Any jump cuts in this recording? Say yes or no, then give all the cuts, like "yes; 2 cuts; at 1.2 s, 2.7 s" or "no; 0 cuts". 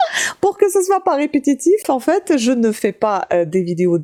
no; 0 cuts